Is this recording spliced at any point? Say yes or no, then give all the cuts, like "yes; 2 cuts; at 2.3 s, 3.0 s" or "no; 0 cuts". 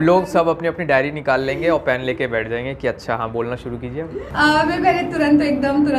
no; 0 cuts